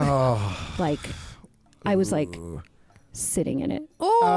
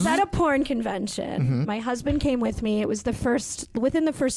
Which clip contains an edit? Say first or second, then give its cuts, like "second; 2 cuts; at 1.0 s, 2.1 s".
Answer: second; 1 cut; at 1.6 s